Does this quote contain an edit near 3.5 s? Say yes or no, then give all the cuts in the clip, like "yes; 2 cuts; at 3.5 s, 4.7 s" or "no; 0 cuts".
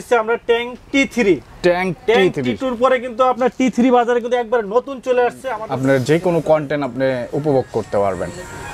no; 1 cut; at 5.6 s